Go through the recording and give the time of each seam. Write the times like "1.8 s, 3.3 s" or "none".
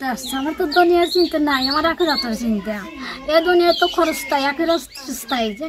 none